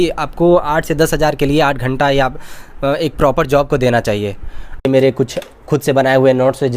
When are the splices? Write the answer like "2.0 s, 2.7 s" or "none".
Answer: 4.8 s